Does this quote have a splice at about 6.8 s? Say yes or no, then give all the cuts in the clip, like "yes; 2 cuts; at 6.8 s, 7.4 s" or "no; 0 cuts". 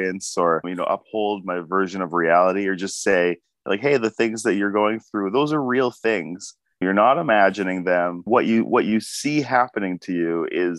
yes; 2 cuts; at 6.8 s, 8.2 s